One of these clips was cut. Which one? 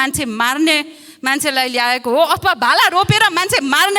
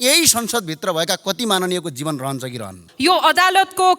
second; 1 cut; at 2.8 s

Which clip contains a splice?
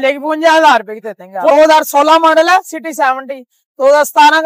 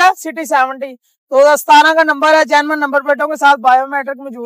first; 1 cut; at 1.5 s

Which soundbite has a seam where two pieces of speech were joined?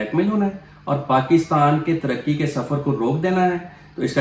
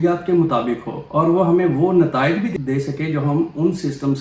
second; 2 cuts; at 0.9 s, 2.5 s

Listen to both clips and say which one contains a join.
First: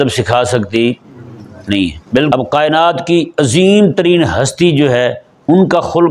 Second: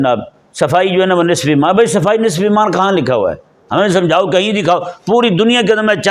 first; 1 cut; at 2.3 s

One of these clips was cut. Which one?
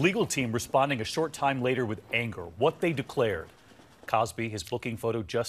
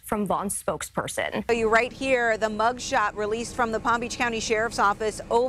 second; 1 cut; at 1.4 s

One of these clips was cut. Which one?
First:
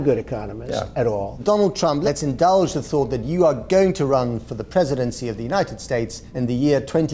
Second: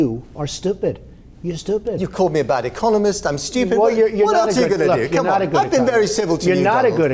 first; 2 cuts; at 1.8 s, 6.2 s

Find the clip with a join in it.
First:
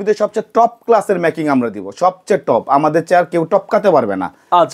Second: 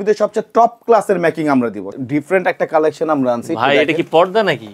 second; 1 cut; at 1.9 s

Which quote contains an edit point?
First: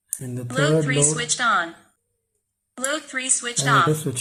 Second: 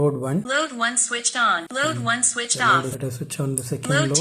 second; 2 cuts; at 1.6 s, 2.9 s

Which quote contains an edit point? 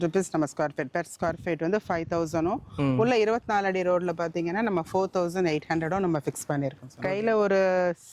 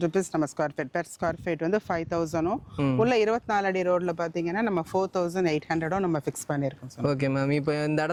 first; 1 cut; at 6.9 s

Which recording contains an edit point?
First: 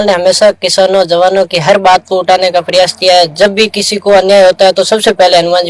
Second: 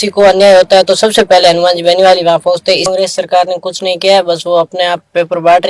second; 1 cut; at 2.9 s

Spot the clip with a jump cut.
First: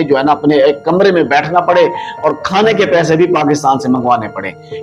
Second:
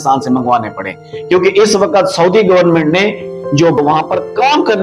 second; 1 cut; at 3.8 s

